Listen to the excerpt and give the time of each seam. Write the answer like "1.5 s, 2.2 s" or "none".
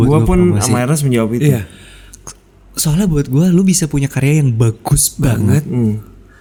none